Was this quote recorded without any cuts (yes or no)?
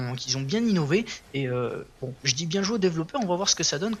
yes